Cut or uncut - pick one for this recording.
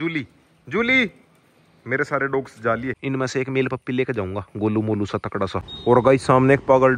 cut